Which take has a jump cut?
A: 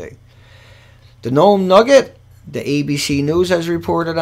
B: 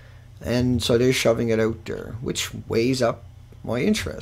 A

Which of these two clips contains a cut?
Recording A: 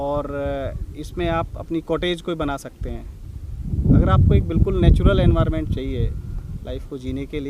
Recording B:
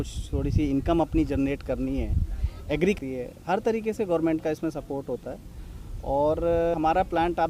B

